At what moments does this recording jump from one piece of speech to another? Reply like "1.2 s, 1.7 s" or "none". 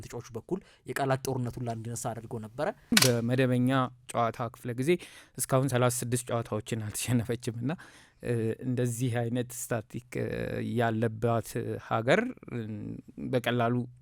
2.9 s